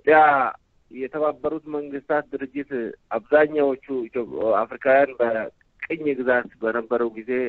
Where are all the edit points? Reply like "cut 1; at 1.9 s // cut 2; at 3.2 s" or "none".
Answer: cut 1; at 1.1 s